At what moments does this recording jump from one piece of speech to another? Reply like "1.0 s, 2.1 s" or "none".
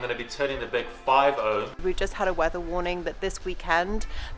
1.8 s

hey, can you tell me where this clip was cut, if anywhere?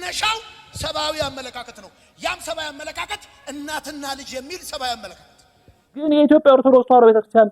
6.1 s

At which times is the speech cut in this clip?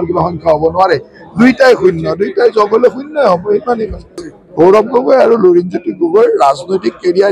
4.2 s

